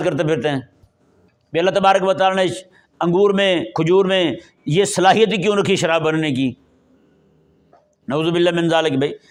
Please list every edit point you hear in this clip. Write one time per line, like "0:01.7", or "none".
none